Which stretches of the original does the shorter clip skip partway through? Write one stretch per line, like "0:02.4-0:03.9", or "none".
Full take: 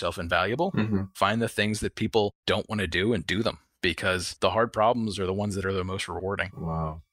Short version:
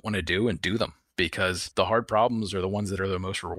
none